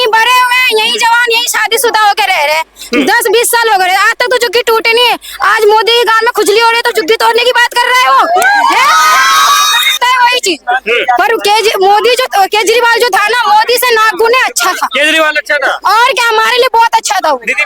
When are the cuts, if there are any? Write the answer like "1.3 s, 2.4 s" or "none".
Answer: 10.0 s

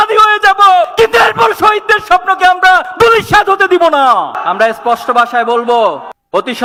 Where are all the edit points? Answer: none

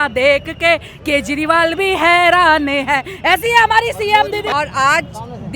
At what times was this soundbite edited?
4.5 s

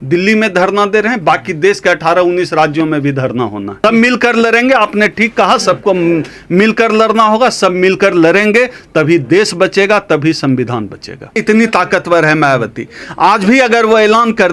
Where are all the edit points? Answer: 3.7 s, 11.4 s

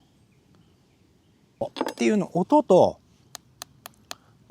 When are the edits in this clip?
1.7 s

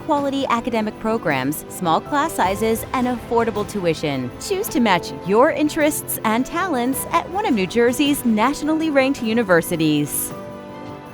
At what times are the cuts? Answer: 10.1 s

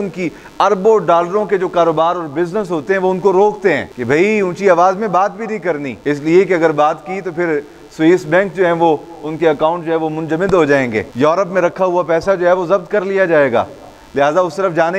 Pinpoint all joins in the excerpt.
none

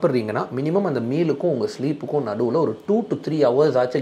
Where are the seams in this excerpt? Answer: none

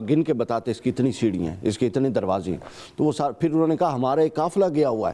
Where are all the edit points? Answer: none

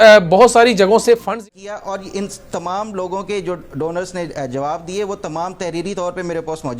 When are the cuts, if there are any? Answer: 1.3 s

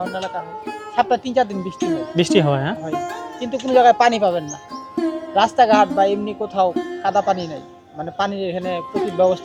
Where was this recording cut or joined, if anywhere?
none

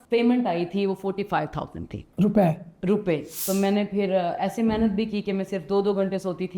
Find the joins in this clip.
3.4 s

